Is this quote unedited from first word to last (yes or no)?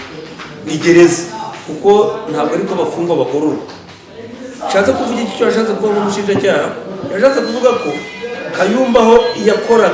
yes